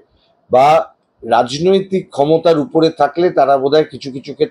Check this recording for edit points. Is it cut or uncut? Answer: uncut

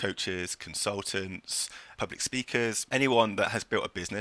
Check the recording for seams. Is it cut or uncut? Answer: cut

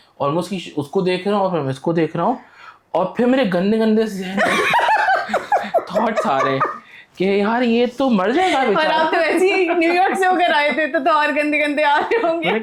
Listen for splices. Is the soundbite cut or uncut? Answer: uncut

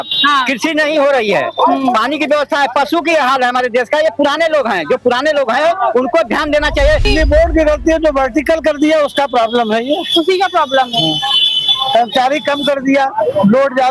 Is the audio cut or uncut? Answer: cut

